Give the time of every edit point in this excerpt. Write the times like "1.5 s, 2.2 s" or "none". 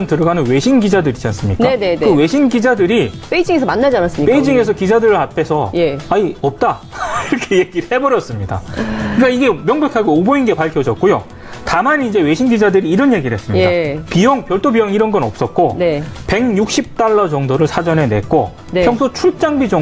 none